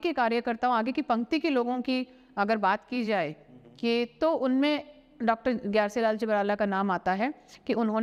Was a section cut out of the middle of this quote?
no; 0 cuts

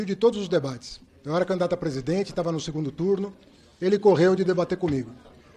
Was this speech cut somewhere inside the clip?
no; 0 cuts

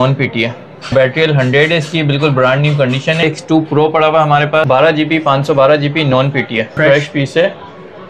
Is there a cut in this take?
yes; 4 cuts; at 0.9 s, 3.2 s, 4.6 s, 6.8 s

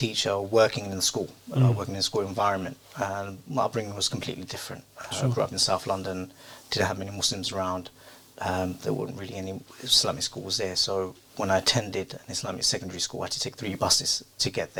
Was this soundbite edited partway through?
no; 0 cuts

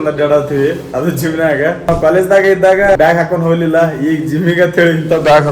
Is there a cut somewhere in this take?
yes; 2 cuts; at 1.9 s, 3.0 s

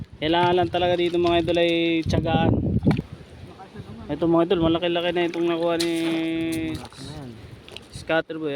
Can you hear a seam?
yes; 1 cut; at 3.0 s

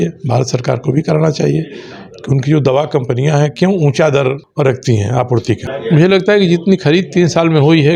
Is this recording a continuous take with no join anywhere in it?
no; 2 cuts; at 4.4 s, 5.7 s

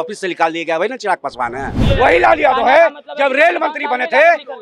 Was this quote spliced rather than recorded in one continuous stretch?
yes; 1 cut; at 1.8 s

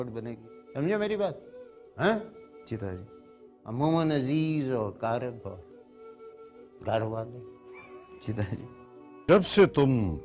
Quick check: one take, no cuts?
no; 1 cut; at 9.1 s

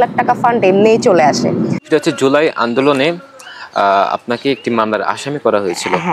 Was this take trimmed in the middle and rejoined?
yes; 1 cut; at 1.8 s

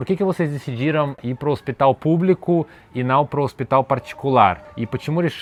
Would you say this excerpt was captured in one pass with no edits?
yes; 0 cuts

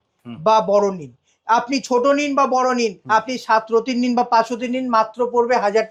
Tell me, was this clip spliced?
no; 0 cuts

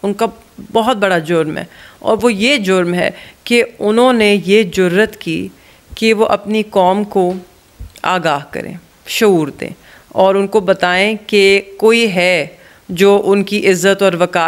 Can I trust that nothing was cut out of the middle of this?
yes; 0 cuts

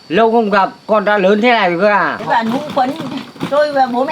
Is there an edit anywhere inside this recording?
yes; 1 cut; at 2.2 s

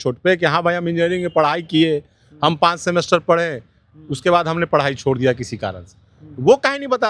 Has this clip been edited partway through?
no; 0 cuts

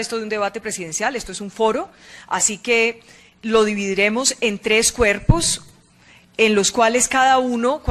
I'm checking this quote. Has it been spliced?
no; 0 cuts

